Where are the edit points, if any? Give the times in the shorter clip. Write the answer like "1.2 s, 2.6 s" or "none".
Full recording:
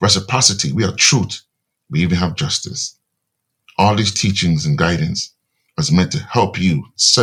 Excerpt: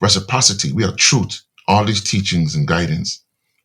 1.5 s